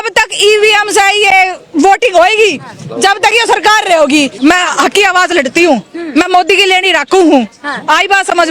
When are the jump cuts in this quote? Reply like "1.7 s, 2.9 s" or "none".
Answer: 4.4 s